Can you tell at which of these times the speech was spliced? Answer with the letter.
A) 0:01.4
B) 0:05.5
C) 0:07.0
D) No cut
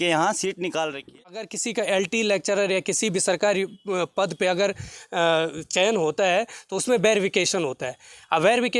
A